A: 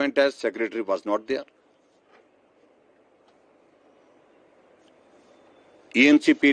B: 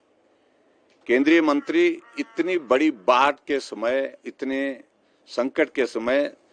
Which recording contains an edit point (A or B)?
B